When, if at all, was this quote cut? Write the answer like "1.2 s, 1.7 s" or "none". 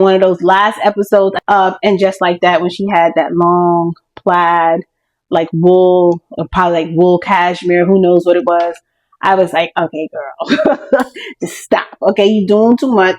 1.4 s